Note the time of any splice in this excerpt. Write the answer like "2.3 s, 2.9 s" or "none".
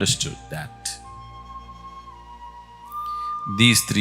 none